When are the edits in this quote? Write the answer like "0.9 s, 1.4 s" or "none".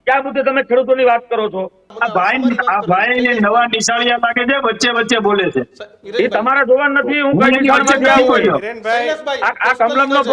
1.8 s

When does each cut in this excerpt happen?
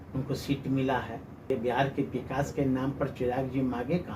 1.5 s

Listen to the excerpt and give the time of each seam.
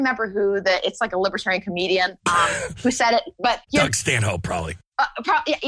3.6 s, 4.8 s

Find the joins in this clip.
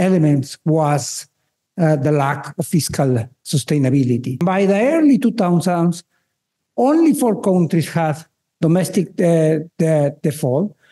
4.4 s

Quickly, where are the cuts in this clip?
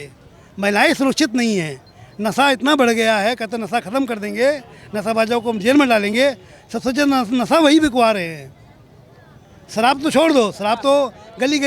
none

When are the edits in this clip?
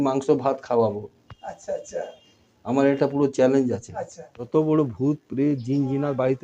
4.5 s

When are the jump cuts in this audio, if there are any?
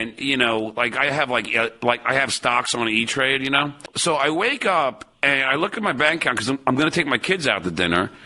3.9 s

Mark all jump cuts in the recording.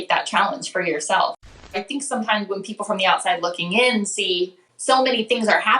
1.7 s, 4.7 s

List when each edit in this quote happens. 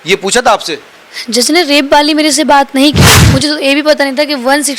3.1 s

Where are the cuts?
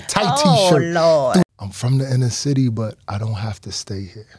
1.5 s

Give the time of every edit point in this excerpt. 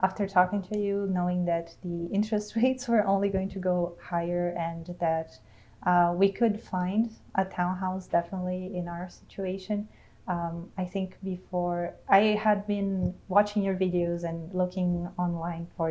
none

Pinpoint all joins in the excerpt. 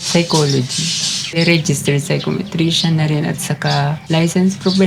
1.4 s, 4.0 s

